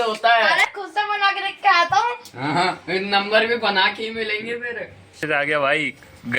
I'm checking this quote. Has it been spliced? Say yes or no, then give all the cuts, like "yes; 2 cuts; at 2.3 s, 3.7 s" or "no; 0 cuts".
yes; 1 cut; at 5.2 s